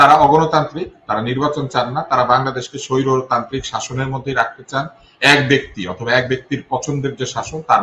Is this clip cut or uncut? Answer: uncut